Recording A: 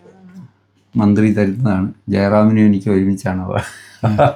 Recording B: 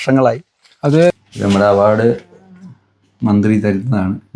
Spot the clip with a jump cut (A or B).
B